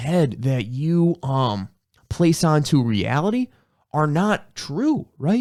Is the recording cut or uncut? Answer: uncut